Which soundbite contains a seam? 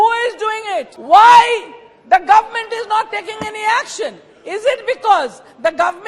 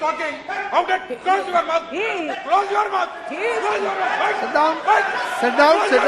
first; 1 cut; at 0.9 s

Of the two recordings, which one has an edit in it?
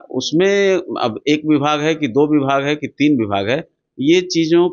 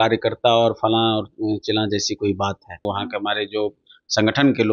second; 1 cut; at 2.9 s

